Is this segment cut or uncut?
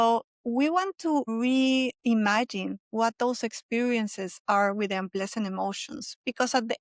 cut